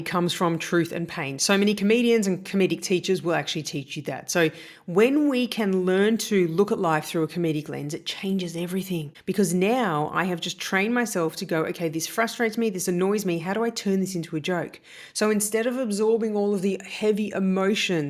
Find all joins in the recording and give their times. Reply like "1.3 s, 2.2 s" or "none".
none

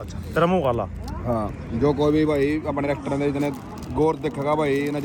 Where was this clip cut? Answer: none

